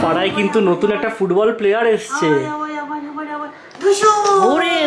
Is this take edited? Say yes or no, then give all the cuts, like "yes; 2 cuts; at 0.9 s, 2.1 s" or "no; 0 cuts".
no; 0 cuts